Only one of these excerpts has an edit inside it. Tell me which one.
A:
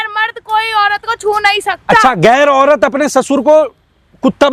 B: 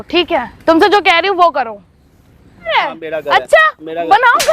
B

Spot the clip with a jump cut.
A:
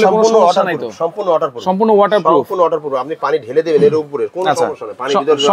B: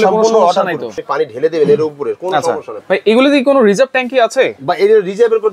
B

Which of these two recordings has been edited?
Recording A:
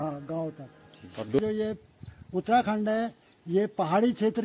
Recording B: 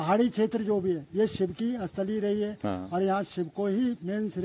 A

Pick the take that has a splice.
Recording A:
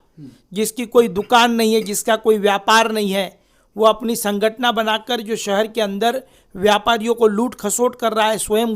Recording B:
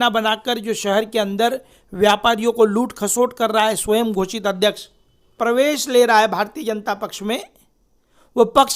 B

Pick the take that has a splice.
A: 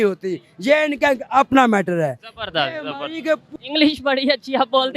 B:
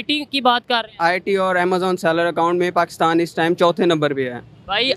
A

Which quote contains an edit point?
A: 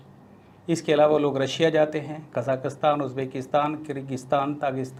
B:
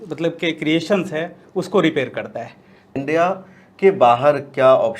B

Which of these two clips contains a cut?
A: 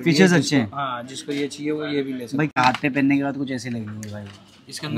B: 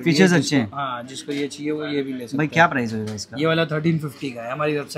A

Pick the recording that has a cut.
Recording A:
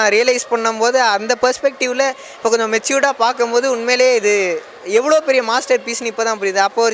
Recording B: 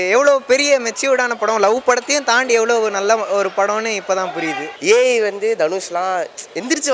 B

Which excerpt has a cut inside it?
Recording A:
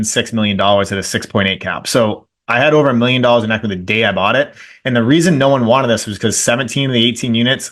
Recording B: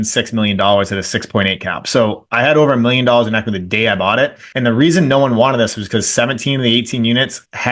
B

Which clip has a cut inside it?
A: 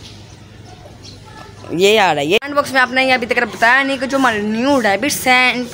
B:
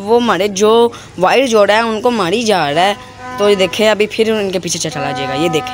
A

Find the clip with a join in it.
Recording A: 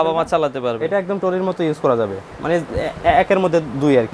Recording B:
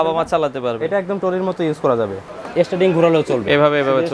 B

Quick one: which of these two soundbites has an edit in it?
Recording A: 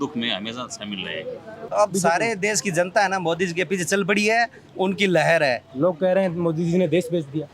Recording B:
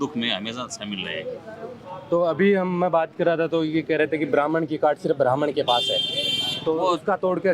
A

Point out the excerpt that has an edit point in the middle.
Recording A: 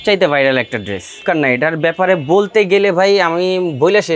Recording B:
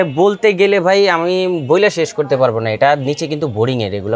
A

